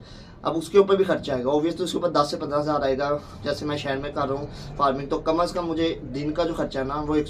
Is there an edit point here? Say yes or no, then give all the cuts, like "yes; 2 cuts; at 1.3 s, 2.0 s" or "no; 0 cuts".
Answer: no; 0 cuts